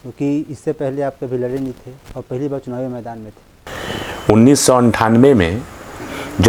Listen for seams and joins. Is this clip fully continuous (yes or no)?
yes